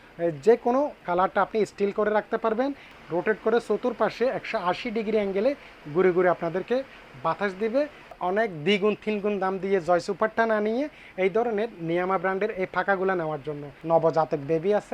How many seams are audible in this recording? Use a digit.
3